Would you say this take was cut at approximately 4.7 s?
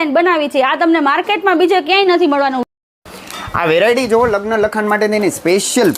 no; 1 cut; at 2.6 s

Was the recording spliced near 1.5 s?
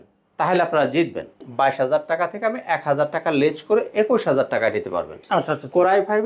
yes; 1 cut; at 1.5 s

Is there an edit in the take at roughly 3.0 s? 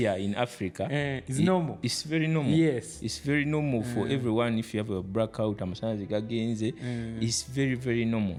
no; 0 cuts

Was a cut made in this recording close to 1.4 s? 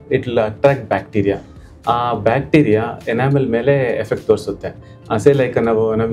no; 0 cuts

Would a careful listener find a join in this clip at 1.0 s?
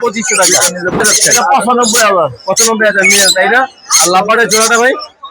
yes; 1 cut; at 1.0 s

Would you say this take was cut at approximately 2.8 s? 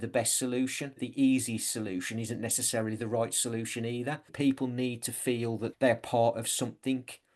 no; 3 cuts; at 1.0 s, 4.3 s, 5.7 s

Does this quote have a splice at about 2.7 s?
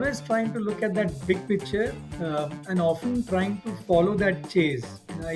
no; 0 cuts

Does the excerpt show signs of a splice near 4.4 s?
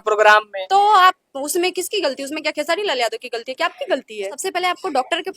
yes; 1 cut; at 4.4 s

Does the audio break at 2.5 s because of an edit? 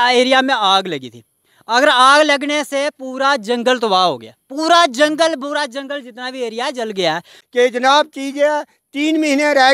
no; 1 cut; at 7.3 s

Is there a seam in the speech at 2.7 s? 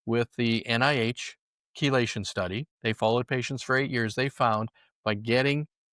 yes; 1 cut; at 2.7 s

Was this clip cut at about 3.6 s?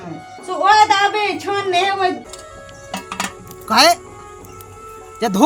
no; 1 cut; at 2.3 s

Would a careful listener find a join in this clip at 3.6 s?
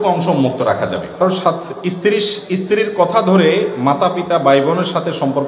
no; 1 cut; at 1.2 s

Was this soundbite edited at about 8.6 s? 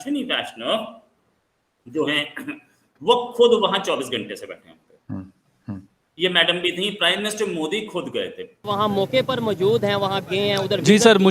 yes; 1 cut; at 8.6 s

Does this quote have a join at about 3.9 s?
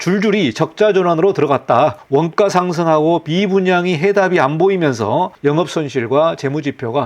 no; 2 cuts; at 2.0 s, 5.3 s

